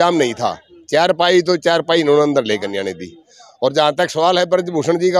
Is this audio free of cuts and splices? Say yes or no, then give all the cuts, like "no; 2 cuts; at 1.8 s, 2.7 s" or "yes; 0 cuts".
yes; 0 cuts